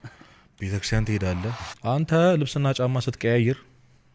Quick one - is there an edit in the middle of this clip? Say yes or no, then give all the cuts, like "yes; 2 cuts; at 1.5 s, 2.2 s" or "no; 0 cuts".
yes; 1 cut; at 1.7 s